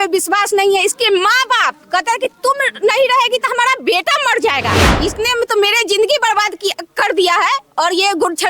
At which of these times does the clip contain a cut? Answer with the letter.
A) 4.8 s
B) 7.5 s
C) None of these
A